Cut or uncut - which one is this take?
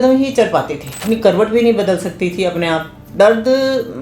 cut